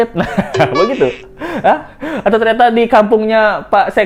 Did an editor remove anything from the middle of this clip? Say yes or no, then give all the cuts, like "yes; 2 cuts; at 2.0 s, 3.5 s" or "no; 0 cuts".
no; 0 cuts